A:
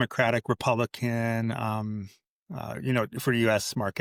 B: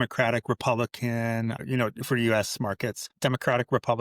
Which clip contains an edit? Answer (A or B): B